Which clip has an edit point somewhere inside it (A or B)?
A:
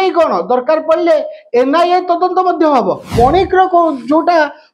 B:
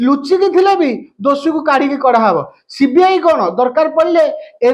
A